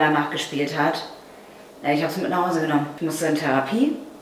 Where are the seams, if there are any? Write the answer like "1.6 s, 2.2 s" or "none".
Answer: 2.9 s